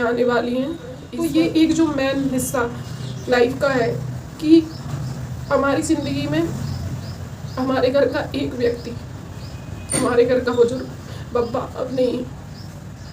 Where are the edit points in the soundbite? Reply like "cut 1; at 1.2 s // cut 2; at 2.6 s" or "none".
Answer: cut 1; at 1.1 s